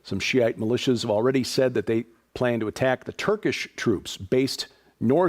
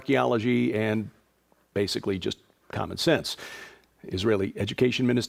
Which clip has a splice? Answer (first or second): first